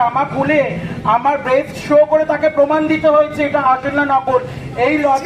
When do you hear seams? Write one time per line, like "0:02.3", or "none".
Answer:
none